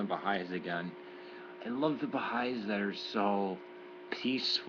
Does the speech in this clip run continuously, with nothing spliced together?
yes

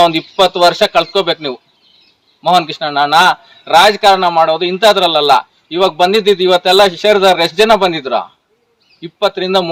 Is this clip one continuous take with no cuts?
yes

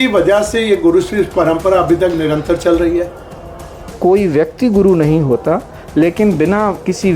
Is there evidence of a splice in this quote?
yes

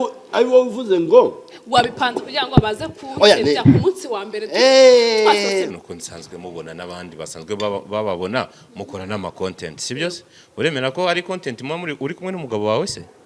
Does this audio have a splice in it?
yes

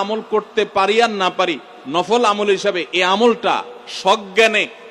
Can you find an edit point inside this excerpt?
no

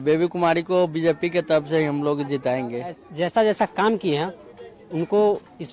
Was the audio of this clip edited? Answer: yes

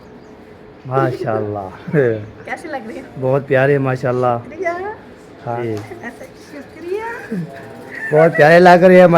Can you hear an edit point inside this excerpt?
yes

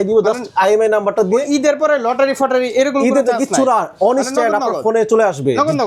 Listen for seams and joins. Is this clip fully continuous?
yes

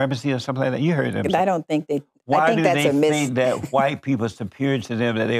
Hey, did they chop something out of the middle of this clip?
no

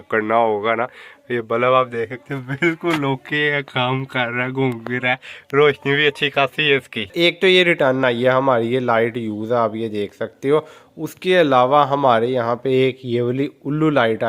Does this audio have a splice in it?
yes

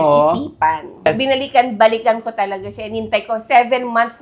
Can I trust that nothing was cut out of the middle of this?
no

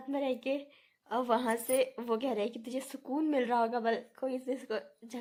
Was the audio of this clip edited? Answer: no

